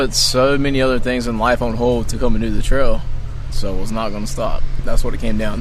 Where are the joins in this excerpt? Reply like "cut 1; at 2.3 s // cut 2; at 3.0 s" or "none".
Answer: cut 1; at 3.5 s // cut 2; at 4.7 s